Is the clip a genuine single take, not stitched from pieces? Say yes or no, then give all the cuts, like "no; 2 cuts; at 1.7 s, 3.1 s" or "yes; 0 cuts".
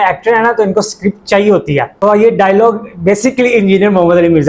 no; 1 cut; at 1.9 s